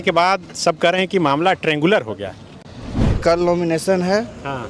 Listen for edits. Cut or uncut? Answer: cut